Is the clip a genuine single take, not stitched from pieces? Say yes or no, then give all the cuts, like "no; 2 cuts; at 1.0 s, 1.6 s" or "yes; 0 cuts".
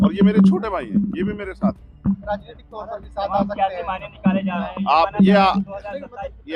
yes; 0 cuts